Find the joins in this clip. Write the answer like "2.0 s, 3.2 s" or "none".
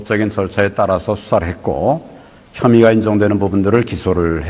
none